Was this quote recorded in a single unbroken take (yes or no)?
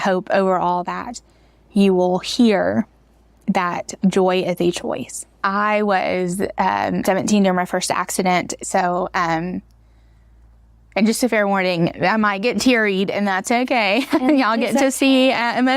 no